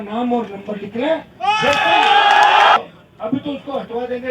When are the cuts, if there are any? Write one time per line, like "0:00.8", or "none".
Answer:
0:02.8